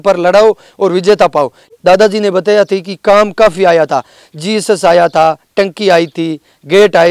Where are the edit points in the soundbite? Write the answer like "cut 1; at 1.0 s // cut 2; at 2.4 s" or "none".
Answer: cut 1; at 1.7 s